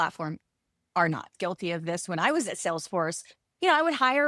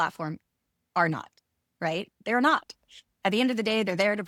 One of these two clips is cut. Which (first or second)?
first